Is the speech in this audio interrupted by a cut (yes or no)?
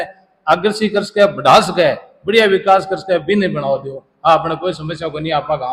no